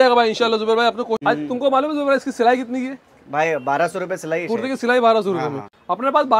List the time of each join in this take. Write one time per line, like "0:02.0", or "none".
0:01.2